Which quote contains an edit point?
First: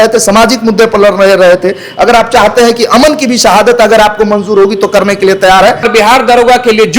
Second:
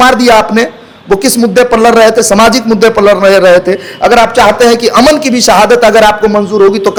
first; 1 cut; at 5.9 s

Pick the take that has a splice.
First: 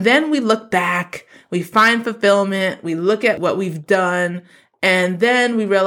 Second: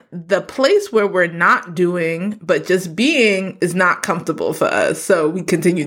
first; 1 cut; at 3.4 s

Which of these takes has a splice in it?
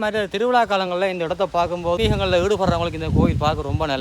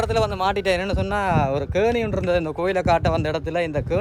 first; 1 cut; at 2.0 s

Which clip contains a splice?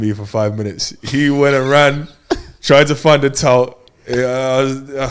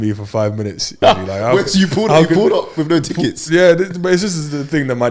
second; 1 cut; at 0.9 s

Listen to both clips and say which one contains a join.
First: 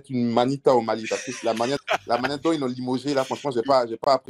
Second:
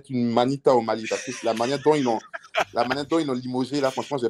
first; 1 cut; at 1.8 s

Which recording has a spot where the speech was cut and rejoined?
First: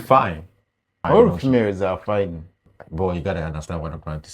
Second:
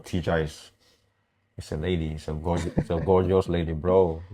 first; 2 cuts; at 1.1 s, 2.6 s

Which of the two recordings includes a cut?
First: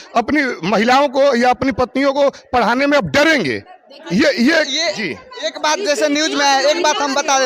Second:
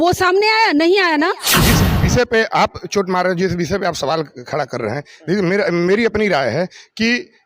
second; 1 cut; at 1.6 s

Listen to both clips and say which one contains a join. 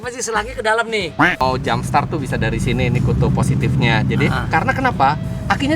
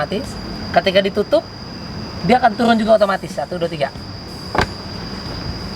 first; 1 cut; at 1.4 s

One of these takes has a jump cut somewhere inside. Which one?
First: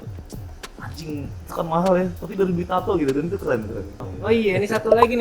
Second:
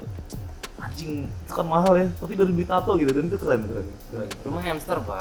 first; 1 cut; at 4.0 s

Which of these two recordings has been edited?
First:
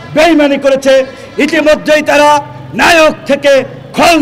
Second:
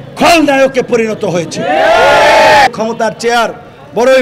second; 1 cut; at 2.7 s

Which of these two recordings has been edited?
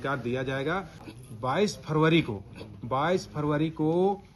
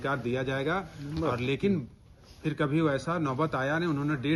first; 1 cut; at 1.1 s

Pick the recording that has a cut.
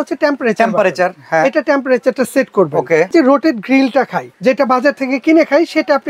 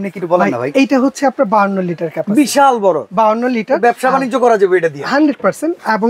first; 2 cuts; at 3.1 s, 4.2 s

